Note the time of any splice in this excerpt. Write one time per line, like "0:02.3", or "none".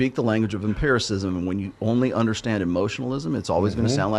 none